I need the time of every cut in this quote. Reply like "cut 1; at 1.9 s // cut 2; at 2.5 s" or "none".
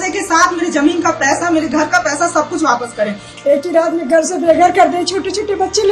cut 1; at 3.2 s